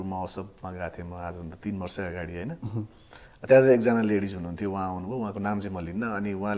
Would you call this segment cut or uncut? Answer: uncut